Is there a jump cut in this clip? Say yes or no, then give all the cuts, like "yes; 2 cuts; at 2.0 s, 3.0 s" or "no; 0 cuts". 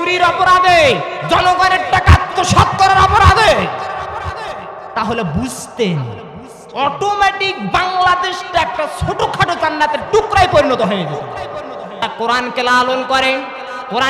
yes; 1 cut; at 12.0 s